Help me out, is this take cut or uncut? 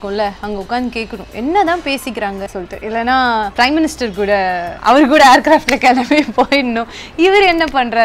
cut